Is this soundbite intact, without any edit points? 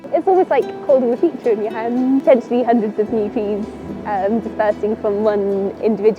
no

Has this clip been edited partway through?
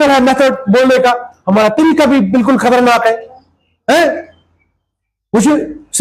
no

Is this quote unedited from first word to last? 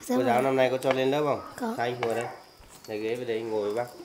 yes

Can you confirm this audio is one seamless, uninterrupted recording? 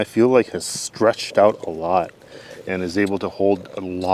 yes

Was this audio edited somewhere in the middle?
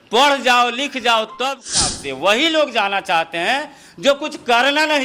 yes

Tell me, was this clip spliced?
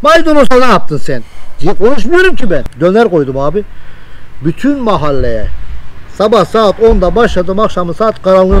yes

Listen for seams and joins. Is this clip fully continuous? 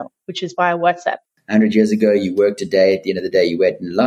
no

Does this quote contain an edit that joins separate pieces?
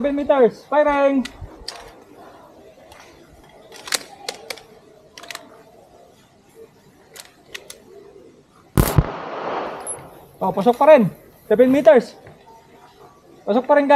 no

